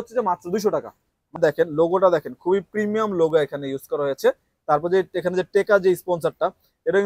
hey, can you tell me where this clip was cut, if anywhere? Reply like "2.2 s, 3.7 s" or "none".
1.4 s